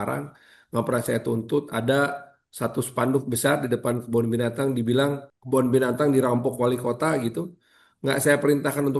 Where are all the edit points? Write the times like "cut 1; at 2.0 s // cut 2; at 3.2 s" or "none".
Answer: cut 1; at 5.3 s